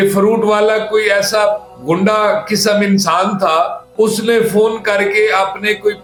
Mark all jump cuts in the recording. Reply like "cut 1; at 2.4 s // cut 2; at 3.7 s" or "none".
none